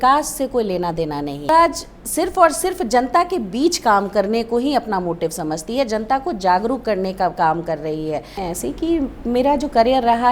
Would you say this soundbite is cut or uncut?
cut